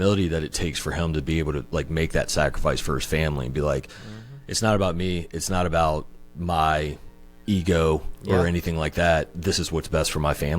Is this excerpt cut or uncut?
cut